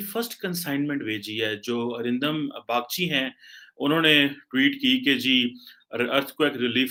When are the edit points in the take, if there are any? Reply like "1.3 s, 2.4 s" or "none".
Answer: none